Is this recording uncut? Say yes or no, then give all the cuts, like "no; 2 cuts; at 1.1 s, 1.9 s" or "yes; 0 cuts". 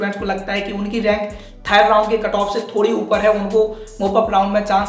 yes; 0 cuts